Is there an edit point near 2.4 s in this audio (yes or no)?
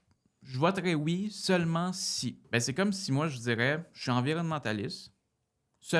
yes